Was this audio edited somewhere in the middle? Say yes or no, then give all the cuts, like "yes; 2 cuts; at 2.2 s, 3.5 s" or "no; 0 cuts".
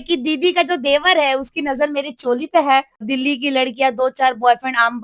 yes; 1 cut; at 3.0 s